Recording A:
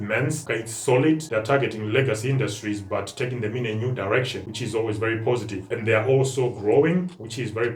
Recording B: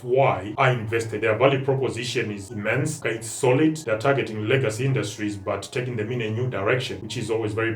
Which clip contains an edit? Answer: B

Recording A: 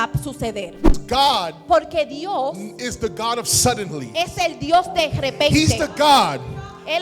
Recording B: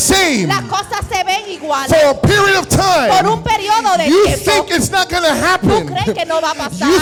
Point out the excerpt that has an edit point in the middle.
A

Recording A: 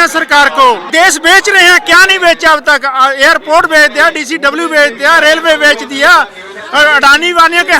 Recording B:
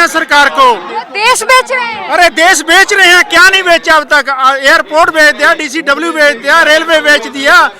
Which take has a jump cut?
A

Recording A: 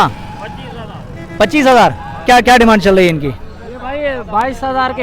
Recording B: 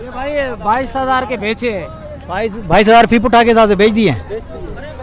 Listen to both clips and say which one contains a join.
A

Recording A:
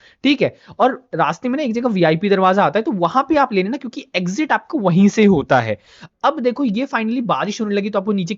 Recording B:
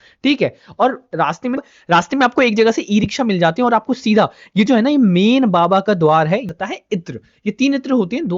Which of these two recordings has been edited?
B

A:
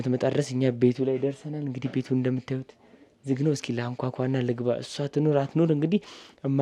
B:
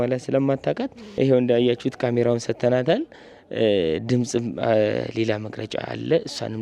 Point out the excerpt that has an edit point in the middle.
B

